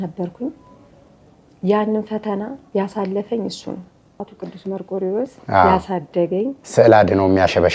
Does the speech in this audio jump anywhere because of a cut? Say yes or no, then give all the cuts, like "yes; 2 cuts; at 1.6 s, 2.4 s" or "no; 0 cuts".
yes; 1 cut; at 4.3 s